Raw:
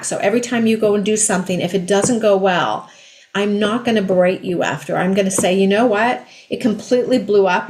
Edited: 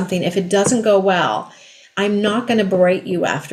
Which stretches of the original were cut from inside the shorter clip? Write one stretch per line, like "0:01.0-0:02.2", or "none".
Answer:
none